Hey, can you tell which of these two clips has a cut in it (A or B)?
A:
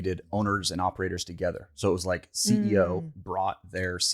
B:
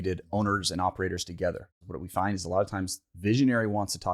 B